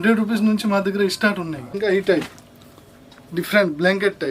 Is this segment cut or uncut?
cut